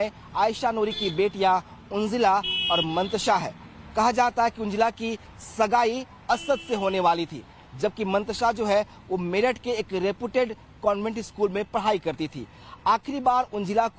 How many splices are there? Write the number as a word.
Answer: zero